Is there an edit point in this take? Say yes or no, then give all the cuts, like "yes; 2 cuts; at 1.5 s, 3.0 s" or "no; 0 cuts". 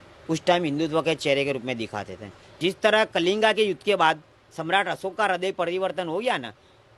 yes; 1 cut; at 2.6 s